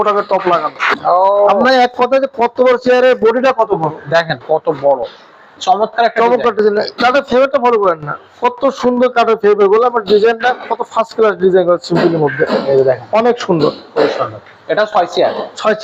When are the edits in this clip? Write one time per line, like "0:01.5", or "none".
0:01.0
0:05.6